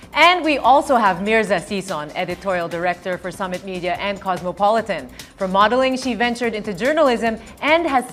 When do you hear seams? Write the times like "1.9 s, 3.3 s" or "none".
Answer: 6.8 s